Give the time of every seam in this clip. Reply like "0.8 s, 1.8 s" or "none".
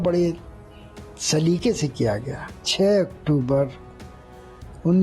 2.7 s